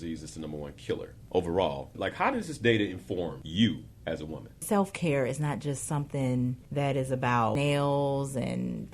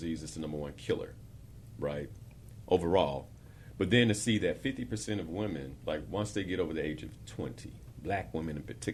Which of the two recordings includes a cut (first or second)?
first